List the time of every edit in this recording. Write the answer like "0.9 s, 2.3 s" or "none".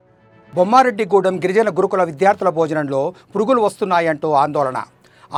none